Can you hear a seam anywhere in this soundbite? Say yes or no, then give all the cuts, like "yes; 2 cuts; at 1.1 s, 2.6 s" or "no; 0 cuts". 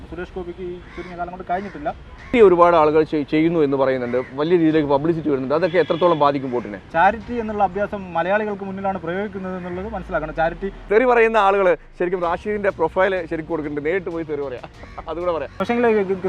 yes; 3 cuts; at 2.3 s, 10.8 s, 15.5 s